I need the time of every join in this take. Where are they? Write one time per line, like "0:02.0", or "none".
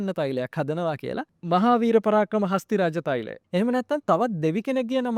0:01.3